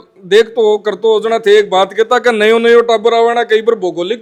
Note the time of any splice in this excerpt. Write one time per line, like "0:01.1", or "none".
none